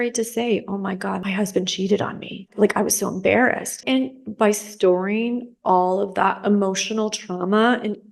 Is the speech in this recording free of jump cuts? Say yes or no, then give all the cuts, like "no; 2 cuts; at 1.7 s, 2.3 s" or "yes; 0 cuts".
no; 3 cuts; at 1.2 s, 2.5 s, 3.7 s